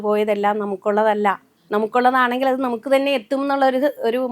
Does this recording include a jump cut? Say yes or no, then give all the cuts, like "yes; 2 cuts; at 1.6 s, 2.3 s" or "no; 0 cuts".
yes; 1 cut; at 1.5 s